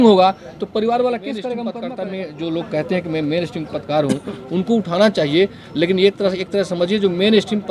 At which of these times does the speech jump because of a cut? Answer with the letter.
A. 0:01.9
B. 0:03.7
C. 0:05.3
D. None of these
A